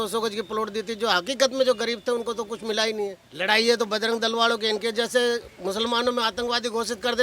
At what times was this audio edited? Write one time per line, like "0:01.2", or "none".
0:03.3